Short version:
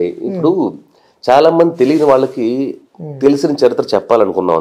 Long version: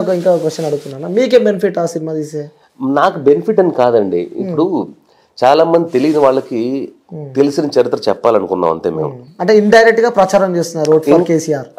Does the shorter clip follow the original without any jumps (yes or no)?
yes